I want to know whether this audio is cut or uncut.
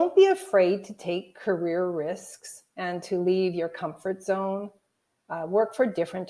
uncut